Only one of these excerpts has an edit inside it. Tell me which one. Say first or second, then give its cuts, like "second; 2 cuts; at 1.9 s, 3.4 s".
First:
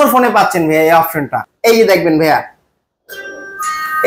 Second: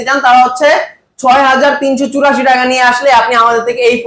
first; 1 cut; at 1.4 s